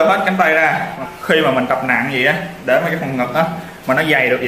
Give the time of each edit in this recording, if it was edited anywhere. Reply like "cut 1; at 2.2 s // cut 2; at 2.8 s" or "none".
cut 1; at 1.0 s